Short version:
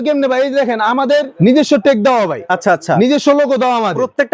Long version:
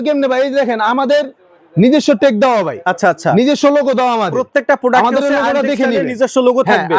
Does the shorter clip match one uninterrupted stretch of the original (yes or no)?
no